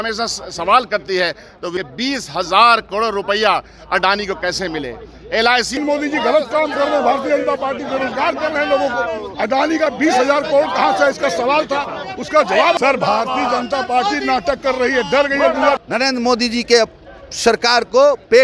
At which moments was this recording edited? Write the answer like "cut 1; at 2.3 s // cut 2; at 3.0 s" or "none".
cut 1; at 1.7 s // cut 2; at 5.8 s // cut 3; at 12.7 s // cut 4; at 15.8 s